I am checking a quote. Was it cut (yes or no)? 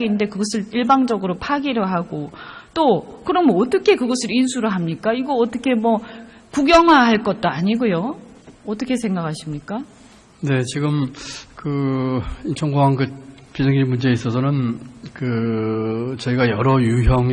yes